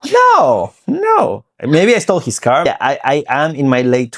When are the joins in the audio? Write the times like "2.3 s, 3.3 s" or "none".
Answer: 2.7 s